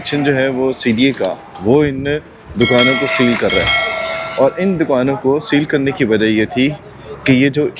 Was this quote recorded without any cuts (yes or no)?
yes